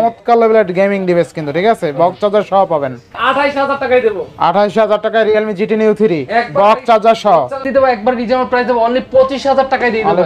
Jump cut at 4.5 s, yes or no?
no